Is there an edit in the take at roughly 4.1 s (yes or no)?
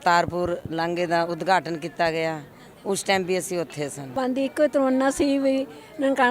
yes